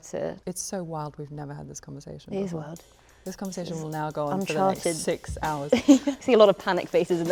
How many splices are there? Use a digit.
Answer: 1